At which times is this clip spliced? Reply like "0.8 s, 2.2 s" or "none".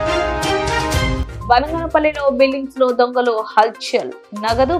1.2 s